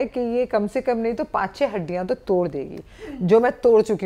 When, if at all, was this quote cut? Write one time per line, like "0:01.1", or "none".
none